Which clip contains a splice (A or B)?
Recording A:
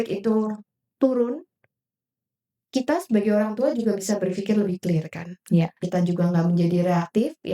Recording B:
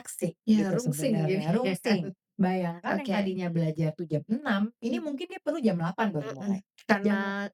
A